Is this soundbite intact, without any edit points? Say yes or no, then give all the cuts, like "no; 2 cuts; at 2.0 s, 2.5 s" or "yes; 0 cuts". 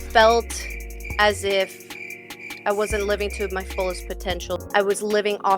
no; 1 cut; at 4.7 s